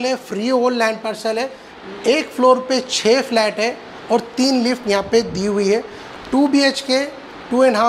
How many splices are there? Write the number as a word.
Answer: one